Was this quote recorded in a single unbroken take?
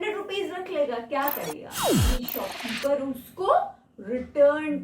no; 1 cut; at 2.0 s

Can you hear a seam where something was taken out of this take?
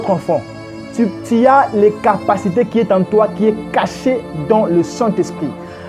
no; 0 cuts

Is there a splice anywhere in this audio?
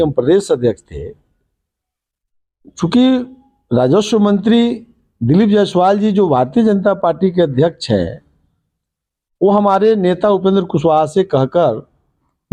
no; 0 cuts

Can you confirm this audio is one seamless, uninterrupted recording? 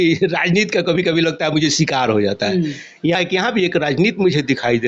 no; 1 cut; at 3.2 s

